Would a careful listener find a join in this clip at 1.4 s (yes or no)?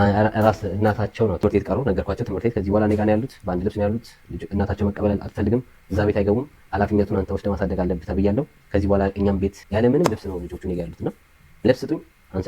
yes